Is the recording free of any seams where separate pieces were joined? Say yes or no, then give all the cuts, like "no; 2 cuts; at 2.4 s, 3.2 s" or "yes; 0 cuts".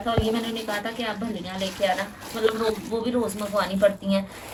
yes; 0 cuts